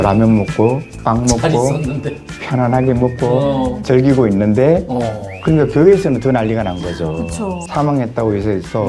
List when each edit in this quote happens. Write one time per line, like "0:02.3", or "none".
0:00.9
0:07.5

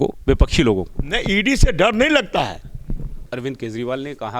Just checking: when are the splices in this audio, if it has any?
0:03.3

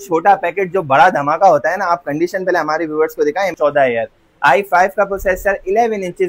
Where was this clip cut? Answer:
0:03.5

